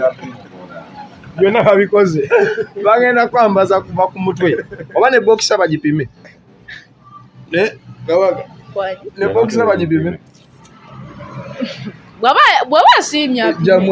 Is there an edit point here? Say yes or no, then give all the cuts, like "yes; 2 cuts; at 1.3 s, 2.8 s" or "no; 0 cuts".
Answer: no; 0 cuts